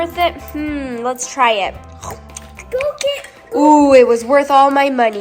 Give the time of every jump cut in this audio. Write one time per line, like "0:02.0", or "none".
none